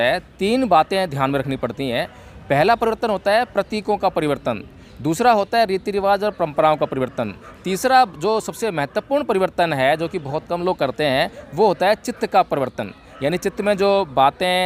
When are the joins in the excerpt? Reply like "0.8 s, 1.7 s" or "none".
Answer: none